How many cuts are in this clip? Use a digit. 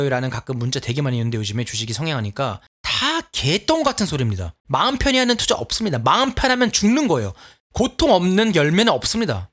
0